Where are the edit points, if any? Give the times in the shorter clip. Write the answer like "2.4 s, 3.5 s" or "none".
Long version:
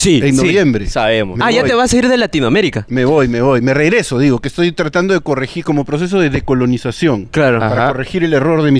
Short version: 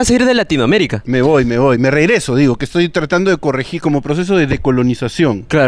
none